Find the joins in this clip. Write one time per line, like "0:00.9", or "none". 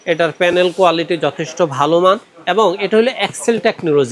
none